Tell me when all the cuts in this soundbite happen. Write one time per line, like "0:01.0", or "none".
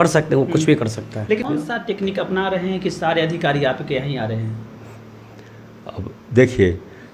0:01.5